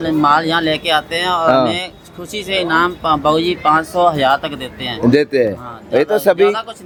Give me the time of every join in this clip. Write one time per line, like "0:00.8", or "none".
none